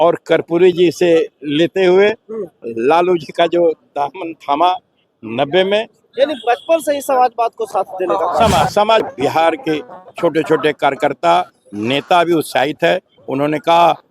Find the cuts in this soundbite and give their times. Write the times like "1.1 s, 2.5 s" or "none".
9.0 s